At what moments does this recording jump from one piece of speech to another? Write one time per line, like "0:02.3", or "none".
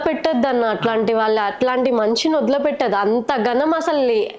none